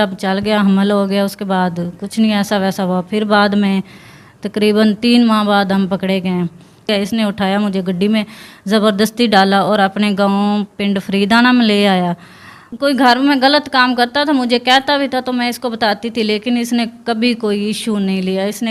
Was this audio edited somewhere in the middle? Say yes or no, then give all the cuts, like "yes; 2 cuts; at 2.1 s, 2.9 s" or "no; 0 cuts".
yes; 2 cuts; at 6.9 s, 12.1 s